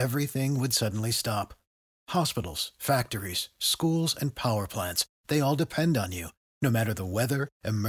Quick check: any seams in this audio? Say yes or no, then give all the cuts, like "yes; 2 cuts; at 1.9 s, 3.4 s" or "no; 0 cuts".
no; 0 cuts